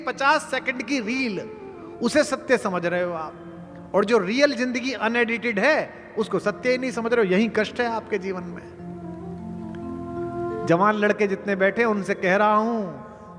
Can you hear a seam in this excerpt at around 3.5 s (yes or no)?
no